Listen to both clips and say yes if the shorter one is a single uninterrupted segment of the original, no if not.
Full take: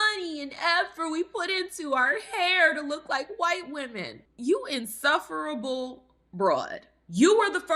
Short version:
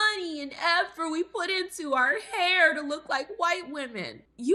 yes